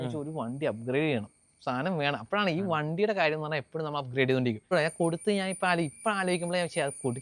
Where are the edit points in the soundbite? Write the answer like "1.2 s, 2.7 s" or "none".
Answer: 4.7 s